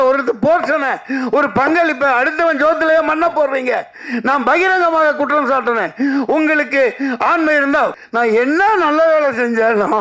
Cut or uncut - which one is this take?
cut